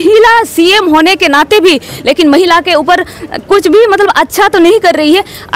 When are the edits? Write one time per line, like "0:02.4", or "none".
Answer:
none